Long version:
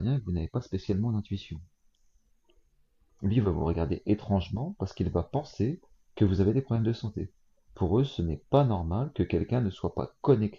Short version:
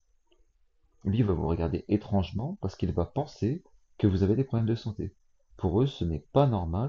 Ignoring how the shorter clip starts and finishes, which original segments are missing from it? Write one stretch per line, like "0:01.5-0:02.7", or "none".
none